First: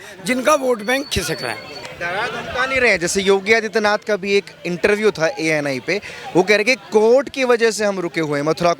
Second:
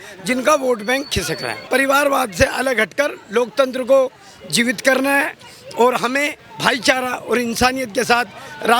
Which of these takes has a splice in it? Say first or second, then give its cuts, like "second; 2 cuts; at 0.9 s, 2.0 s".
second; 2 cuts; at 1.7 s, 6.4 s